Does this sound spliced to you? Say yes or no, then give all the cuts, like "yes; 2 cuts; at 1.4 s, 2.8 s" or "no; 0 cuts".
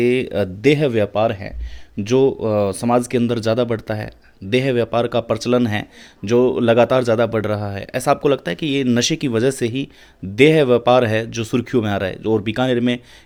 no; 0 cuts